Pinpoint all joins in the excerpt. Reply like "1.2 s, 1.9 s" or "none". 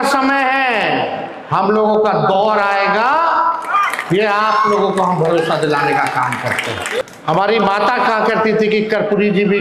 7.0 s